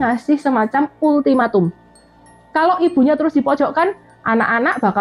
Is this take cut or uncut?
uncut